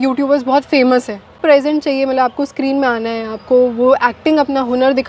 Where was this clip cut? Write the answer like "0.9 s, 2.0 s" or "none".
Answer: 1.4 s